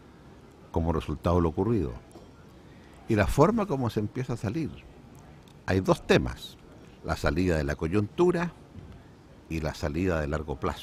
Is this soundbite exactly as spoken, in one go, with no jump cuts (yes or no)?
yes